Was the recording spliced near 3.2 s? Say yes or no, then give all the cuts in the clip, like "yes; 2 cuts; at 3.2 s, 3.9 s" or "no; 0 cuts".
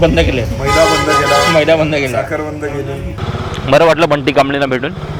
yes; 1 cut; at 3.2 s